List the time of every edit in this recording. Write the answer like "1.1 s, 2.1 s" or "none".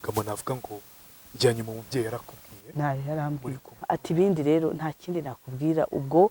3.8 s